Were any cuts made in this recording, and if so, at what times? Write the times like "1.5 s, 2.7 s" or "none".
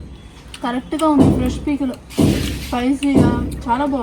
none